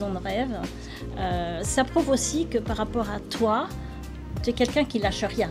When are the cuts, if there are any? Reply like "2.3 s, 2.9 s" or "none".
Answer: none